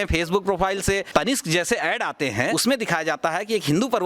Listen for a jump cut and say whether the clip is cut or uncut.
cut